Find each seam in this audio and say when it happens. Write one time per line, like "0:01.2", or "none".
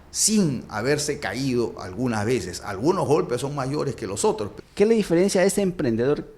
0:04.6